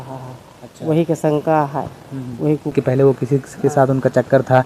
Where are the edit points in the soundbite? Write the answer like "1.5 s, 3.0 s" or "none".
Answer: 2.7 s